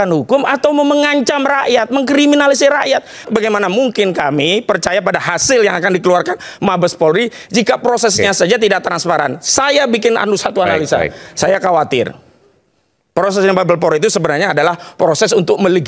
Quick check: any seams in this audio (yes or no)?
yes